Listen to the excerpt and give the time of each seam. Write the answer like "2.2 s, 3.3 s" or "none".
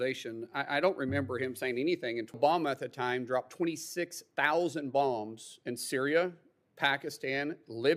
2.4 s